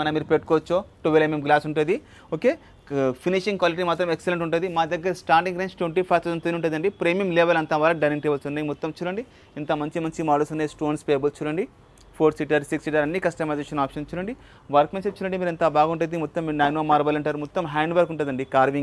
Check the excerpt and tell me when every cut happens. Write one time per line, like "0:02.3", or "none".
none